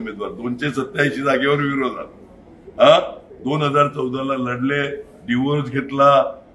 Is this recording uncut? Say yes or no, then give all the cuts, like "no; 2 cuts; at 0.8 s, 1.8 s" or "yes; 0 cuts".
yes; 0 cuts